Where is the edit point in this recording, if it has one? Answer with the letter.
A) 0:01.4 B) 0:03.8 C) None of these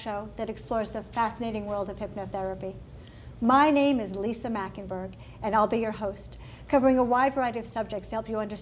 A